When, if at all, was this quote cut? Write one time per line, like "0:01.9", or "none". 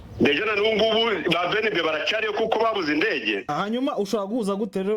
0:03.4